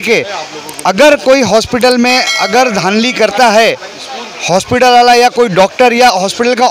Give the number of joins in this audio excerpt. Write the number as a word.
zero